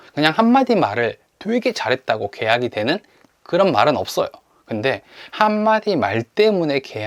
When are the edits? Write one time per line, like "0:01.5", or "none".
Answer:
none